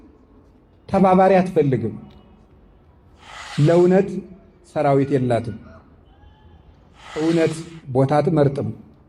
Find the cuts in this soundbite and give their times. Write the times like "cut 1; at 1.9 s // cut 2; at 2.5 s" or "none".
cut 1; at 3.5 s // cut 2; at 7.2 s